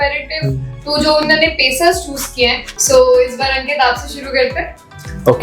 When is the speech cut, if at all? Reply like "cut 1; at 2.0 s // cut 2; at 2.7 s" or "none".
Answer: cut 1; at 2.7 s